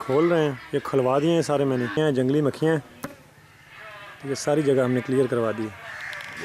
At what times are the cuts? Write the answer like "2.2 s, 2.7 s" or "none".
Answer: 2.0 s